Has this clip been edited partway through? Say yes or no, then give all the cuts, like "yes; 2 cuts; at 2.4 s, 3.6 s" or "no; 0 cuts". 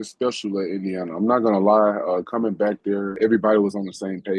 yes; 1 cut; at 3.1 s